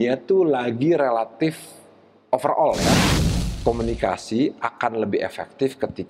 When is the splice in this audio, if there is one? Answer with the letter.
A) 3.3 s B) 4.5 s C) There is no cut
A